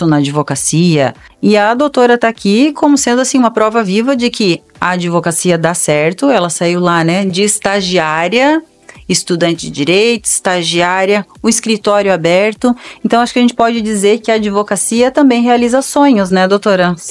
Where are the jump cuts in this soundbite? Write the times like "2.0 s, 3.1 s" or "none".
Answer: 1.2 s